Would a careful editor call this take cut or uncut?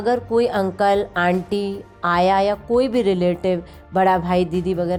uncut